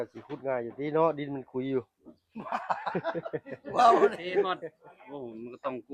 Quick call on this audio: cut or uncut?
cut